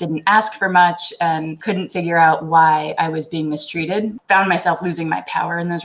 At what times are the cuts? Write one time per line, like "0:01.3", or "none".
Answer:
0:01.5
0:04.2